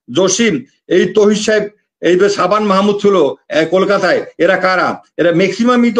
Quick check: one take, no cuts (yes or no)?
yes